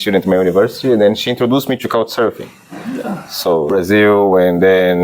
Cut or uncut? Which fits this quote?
cut